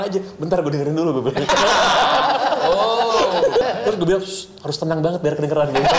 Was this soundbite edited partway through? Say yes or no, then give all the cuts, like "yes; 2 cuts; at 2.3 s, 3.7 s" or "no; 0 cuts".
yes; 1 cut; at 3.6 s